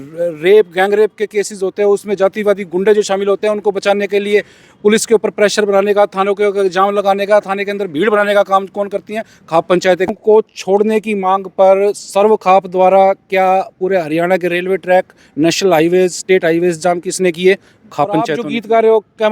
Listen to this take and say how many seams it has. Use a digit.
2